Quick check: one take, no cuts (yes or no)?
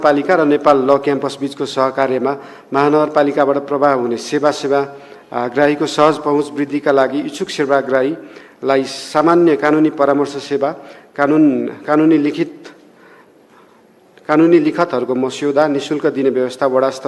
yes